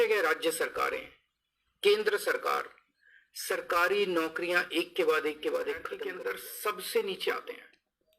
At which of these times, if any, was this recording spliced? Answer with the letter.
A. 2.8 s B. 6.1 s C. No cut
B